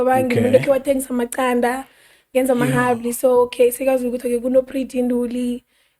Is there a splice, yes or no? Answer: no